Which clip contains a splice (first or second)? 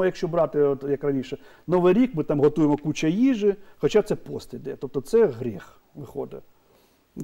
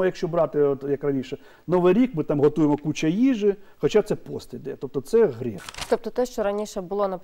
second